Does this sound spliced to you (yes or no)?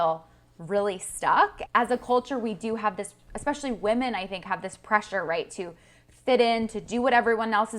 yes